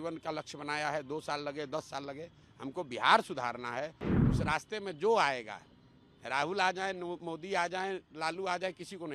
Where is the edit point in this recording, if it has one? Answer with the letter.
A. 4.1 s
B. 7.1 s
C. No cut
A